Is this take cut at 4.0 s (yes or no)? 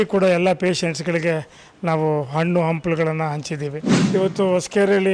yes